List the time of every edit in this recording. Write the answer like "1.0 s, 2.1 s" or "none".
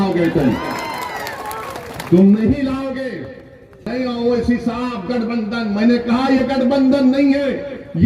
3.8 s